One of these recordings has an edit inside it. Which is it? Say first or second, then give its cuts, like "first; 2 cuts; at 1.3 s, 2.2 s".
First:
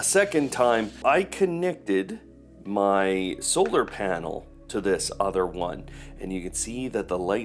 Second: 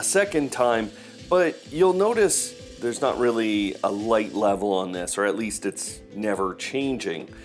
first; 1 cut; at 1.0 s